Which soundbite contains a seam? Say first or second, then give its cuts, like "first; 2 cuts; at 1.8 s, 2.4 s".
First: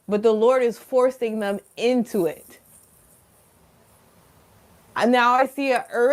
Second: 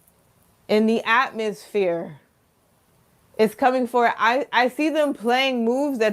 first; 1 cut; at 3.4 s